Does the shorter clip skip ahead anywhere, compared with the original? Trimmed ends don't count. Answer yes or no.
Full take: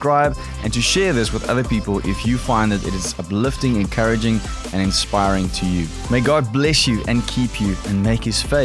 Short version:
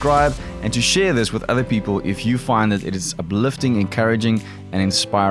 no